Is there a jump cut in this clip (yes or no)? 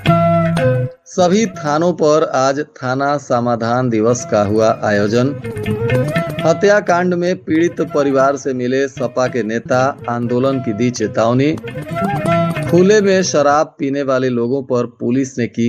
yes